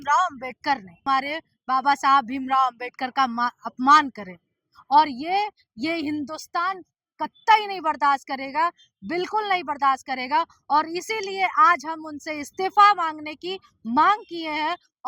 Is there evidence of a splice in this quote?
yes; 1 cut; at 1.0 s

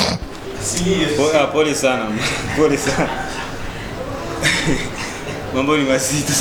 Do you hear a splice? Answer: no; 0 cuts

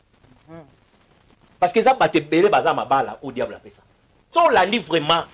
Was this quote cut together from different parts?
yes; 1 cut; at 4.3 s

